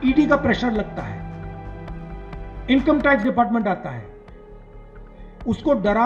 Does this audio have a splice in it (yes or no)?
no